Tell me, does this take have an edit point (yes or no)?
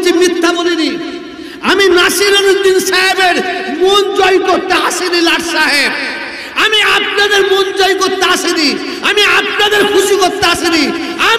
no